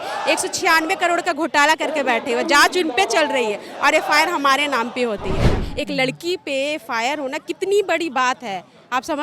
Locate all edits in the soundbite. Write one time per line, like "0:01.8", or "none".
0:05.6